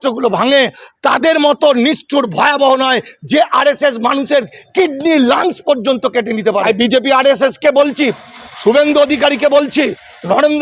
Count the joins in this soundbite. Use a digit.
1